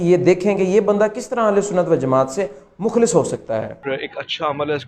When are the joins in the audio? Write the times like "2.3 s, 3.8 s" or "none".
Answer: 3.8 s

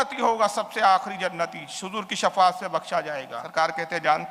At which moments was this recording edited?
3.4 s

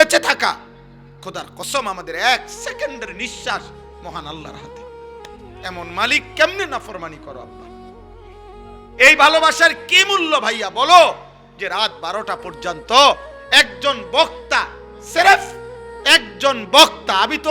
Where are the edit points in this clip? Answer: none

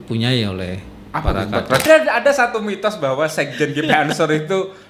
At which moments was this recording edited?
1.8 s

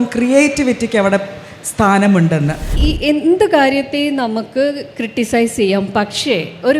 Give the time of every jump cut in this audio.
2.7 s

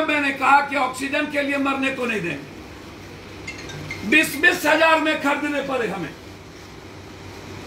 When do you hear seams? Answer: none

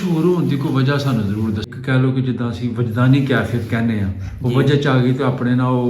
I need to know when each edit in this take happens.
1.7 s

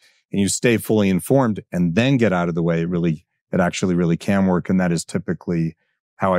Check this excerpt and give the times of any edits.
none

